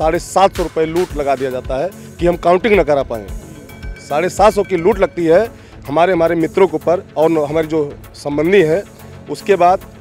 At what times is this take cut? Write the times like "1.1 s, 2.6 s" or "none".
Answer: none